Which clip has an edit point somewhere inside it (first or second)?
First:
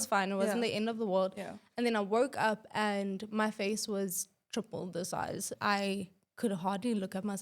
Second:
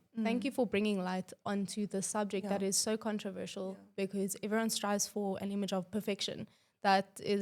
first